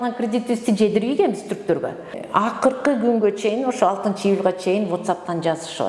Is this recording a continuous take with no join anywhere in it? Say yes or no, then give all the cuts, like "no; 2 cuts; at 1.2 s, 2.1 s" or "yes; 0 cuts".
no; 1 cut; at 2.0 s